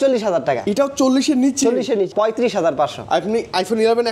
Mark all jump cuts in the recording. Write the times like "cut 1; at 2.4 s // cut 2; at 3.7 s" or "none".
cut 1; at 2.1 s